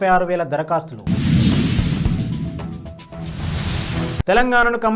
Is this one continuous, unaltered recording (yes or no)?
no